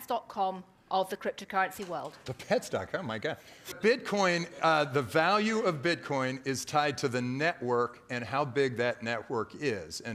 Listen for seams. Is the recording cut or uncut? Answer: cut